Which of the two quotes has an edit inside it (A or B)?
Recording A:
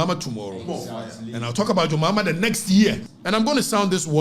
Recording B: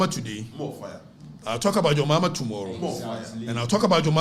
A